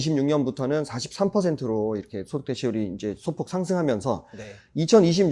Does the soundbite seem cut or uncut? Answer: uncut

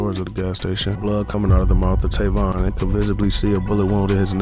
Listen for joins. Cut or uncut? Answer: cut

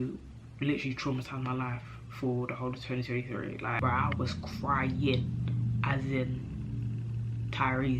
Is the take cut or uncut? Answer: cut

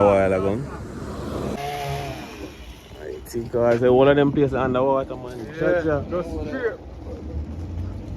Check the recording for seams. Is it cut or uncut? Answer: cut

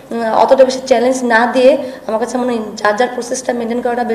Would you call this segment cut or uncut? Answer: uncut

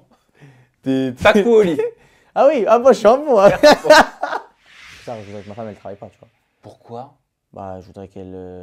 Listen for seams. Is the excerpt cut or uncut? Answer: cut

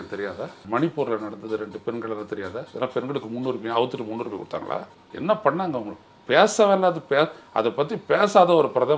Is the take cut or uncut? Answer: uncut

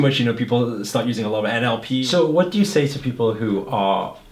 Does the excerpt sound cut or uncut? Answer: cut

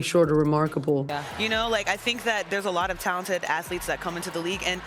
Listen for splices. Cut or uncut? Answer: cut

